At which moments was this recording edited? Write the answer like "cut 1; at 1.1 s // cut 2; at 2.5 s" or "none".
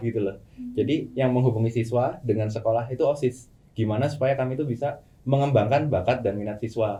none